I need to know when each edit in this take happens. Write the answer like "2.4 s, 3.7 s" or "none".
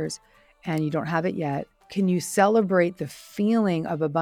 1.8 s